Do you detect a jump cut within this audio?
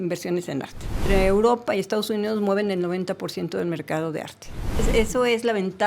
yes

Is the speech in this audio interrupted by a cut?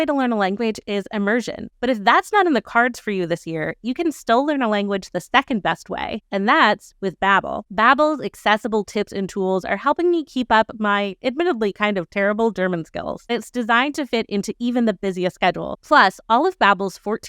yes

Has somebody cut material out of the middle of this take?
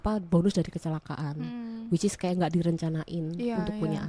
no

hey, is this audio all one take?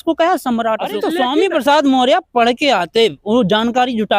no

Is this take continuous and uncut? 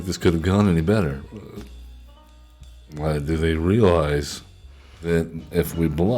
no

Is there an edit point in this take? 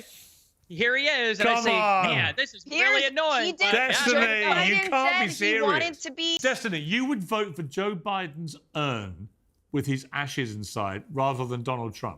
yes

